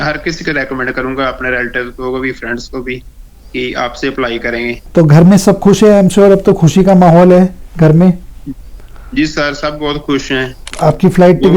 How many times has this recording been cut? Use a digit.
2